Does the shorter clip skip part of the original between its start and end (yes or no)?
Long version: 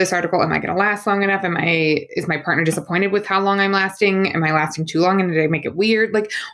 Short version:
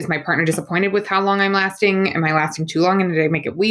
no